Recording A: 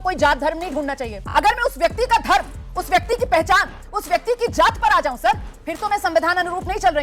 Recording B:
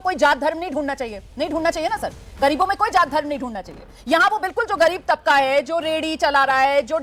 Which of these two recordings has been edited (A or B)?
A